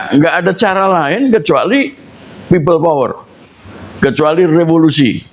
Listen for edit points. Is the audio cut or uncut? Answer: uncut